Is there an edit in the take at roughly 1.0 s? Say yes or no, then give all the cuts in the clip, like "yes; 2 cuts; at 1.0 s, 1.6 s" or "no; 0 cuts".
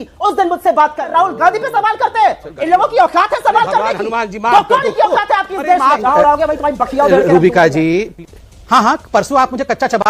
yes; 2 cuts; at 1.0 s, 6.0 s